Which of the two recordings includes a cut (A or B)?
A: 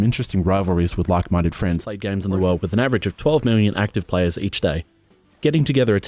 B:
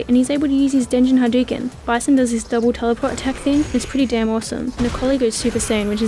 A